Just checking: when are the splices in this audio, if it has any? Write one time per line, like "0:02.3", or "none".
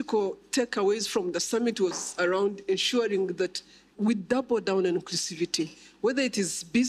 none